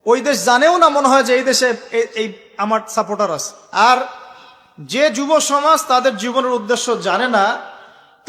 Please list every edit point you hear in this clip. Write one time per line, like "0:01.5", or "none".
0:03.5